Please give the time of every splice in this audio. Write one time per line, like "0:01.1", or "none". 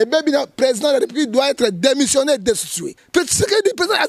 0:02.9